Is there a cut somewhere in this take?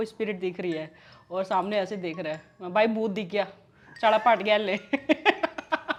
no; 0 cuts

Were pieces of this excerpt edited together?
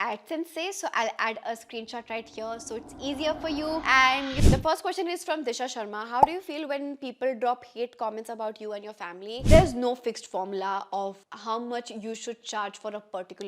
yes; 2 cuts; at 4.3 s, 9.4 s

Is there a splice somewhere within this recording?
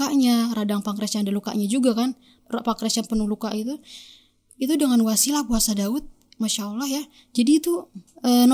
no; 0 cuts

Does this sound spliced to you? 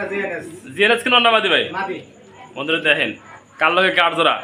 no; 0 cuts

